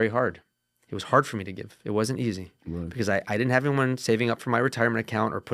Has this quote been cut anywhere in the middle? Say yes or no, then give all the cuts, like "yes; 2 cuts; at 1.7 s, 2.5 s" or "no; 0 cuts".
no; 0 cuts